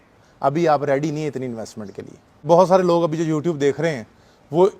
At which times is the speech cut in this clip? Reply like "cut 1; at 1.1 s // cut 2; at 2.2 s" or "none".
cut 1; at 2.4 s